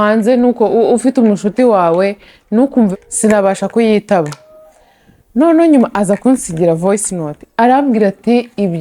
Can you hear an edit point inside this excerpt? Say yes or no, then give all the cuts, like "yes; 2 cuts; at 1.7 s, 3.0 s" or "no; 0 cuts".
yes; 1 cut; at 2.9 s